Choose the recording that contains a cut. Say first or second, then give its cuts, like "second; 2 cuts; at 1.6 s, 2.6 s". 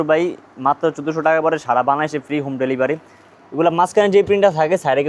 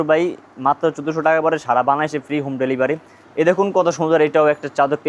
second; 1 cut; at 3.2 s